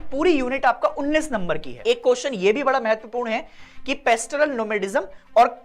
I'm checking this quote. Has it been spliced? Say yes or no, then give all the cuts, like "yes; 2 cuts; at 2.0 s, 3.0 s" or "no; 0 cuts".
yes; 1 cut; at 1.7 s